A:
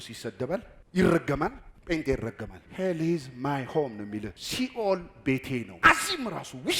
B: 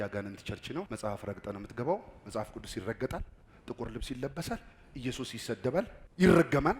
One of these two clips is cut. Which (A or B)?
A